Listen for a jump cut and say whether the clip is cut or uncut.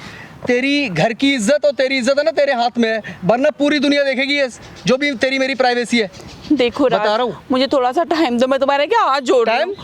uncut